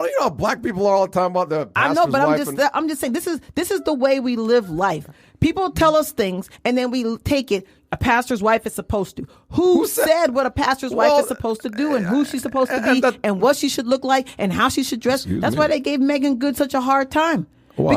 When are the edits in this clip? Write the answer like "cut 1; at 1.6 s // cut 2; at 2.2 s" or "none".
none